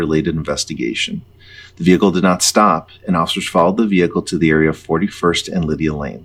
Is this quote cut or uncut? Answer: uncut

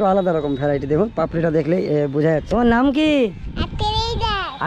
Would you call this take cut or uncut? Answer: cut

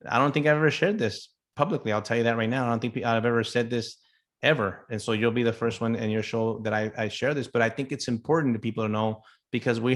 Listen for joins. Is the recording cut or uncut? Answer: uncut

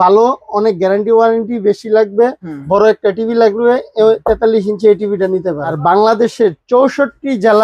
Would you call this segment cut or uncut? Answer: cut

